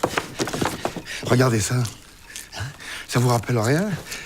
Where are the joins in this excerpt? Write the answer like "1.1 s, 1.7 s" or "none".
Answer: 1.6 s